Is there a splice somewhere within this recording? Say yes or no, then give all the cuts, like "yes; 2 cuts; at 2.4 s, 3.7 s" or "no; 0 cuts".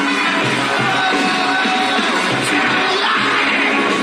yes; 1 cut; at 2.9 s